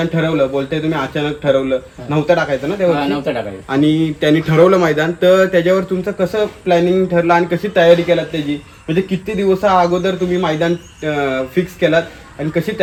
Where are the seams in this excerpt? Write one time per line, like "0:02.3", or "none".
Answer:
none